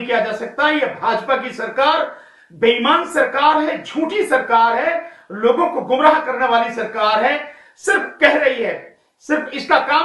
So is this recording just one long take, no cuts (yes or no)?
yes